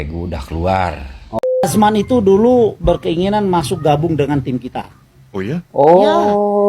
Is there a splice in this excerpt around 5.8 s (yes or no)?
yes